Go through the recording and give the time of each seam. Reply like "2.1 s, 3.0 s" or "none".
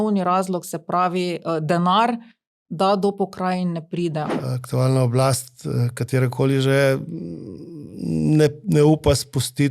4.3 s